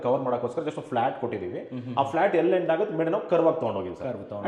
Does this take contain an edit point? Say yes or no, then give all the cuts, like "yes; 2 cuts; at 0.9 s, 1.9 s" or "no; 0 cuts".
no; 0 cuts